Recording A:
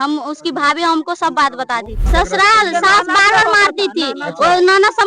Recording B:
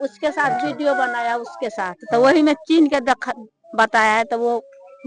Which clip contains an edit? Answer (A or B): A